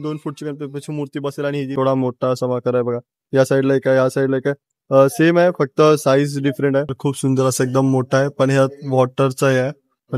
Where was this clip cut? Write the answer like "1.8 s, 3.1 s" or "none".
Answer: 1.7 s, 7.0 s